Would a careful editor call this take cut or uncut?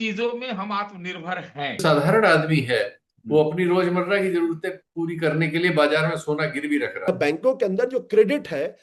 cut